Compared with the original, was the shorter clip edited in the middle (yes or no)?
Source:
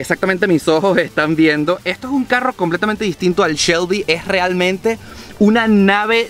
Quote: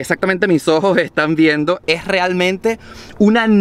yes